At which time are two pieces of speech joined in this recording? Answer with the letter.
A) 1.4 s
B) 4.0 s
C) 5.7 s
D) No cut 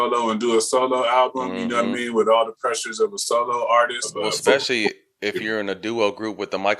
B